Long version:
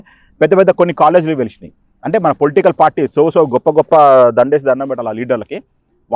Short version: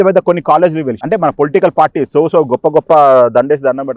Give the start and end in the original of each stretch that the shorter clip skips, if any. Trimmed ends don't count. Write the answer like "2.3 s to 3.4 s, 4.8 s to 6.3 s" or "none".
1.5 s to 2.0 s